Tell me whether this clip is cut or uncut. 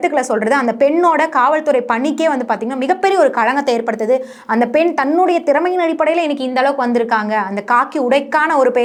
uncut